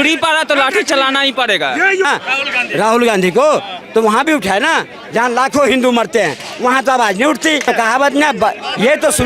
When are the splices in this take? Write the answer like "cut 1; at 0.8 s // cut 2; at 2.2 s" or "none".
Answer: cut 1; at 2.1 s // cut 2; at 7.6 s